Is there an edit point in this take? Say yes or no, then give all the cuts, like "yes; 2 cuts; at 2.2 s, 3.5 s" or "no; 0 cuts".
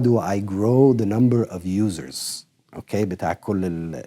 no; 0 cuts